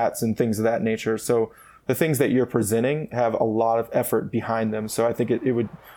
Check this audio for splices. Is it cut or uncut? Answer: uncut